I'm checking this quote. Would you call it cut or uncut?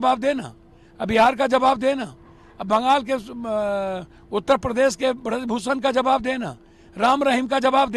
uncut